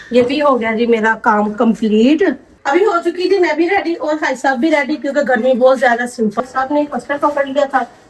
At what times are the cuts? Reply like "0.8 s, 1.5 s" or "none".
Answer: 2.5 s, 6.4 s

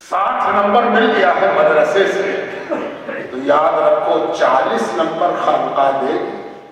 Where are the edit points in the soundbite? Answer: none

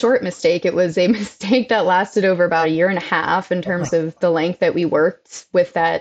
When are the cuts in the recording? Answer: 2.6 s

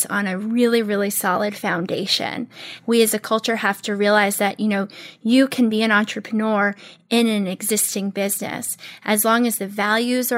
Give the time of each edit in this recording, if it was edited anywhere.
2.7 s

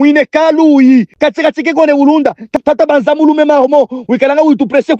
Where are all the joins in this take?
2.5 s

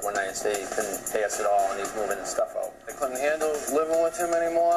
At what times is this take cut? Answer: 1.0 s, 2.9 s

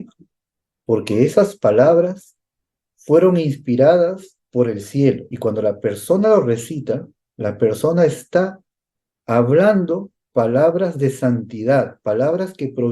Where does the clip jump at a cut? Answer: 5.3 s

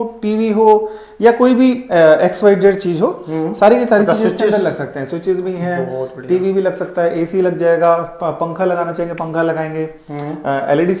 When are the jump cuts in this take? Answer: none

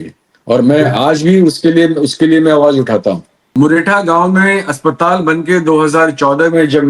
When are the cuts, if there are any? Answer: 3.3 s

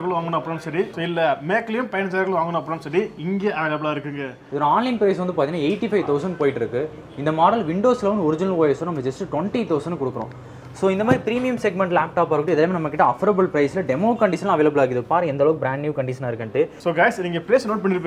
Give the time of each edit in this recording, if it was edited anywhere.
4.4 s, 16.8 s

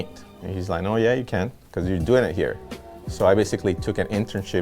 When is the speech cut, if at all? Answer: none

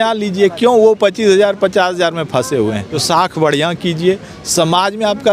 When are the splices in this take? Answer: 3.0 s

